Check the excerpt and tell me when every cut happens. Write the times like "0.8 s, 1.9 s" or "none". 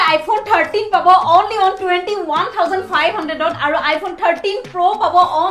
none